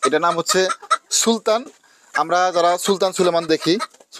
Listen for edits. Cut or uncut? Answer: uncut